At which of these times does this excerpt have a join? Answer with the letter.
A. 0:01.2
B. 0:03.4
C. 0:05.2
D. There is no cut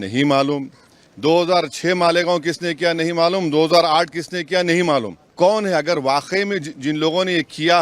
C